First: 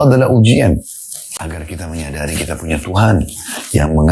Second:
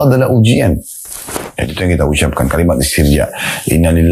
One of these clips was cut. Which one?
second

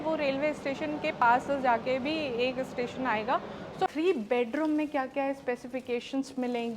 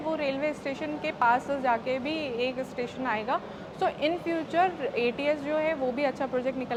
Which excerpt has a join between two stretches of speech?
first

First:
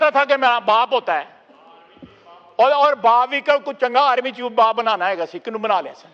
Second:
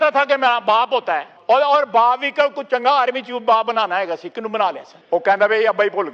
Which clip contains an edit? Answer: second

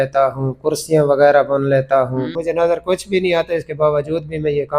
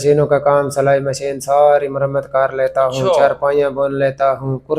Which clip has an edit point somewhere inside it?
first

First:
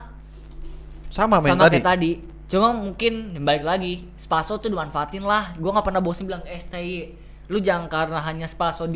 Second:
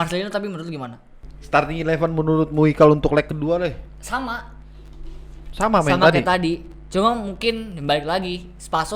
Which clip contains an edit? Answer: second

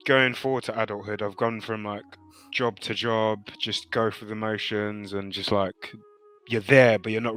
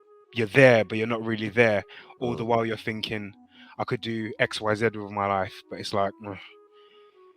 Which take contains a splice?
second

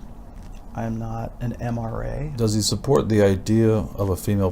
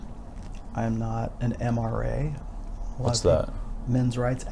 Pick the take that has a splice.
first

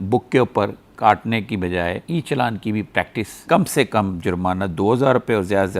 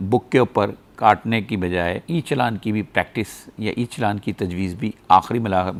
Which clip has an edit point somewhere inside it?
first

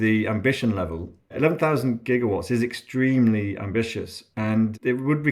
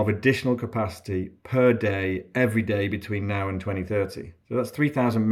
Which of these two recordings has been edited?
first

